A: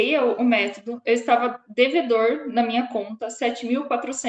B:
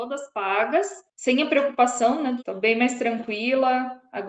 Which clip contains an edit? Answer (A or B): B